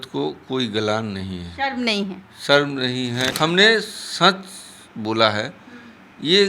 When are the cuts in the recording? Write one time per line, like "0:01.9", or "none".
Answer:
0:03.3